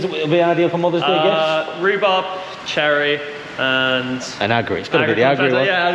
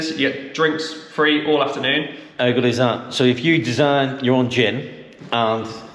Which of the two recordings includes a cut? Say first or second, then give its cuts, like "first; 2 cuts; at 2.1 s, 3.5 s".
second; 1 cut; at 2.2 s